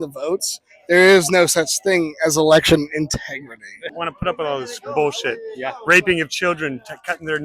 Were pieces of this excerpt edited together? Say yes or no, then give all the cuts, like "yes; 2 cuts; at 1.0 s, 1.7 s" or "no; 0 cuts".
yes; 1 cut; at 3.9 s